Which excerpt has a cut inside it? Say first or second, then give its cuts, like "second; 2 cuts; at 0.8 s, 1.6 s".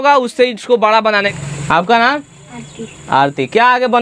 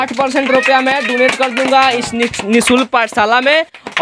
first; 1 cut; at 1.3 s